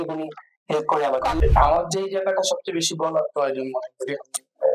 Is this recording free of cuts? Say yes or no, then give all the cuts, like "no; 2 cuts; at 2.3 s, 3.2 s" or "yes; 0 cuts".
no; 1 cut; at 1.4 s